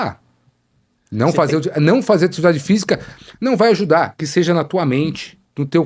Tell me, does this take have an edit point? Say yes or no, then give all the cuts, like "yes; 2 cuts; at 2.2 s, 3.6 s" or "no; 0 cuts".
no; 0 cuts